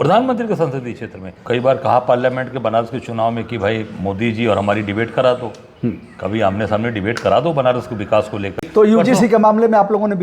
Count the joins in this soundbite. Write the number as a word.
two